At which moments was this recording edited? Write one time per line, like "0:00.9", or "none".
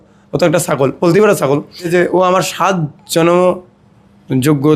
0:01.9